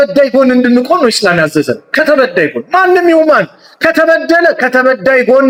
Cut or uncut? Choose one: uncut